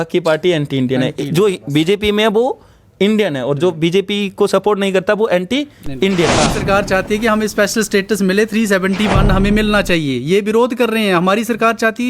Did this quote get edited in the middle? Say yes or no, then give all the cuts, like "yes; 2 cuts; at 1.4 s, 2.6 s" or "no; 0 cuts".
yes; 1 cut; at 6.4 s